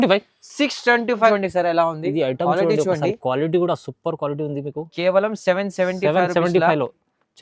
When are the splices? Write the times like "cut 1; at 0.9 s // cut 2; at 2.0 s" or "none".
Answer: cut 1; at 1.3 s